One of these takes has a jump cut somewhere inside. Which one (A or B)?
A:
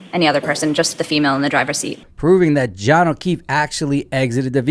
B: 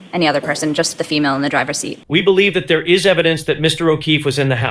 B